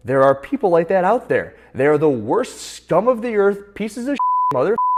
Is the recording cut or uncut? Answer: uncut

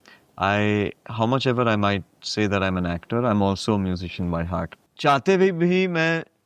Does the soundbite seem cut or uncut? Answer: cut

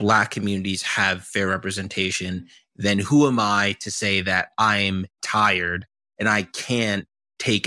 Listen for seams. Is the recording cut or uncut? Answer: uncut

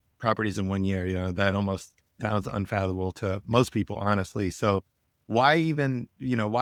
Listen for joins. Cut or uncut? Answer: uncut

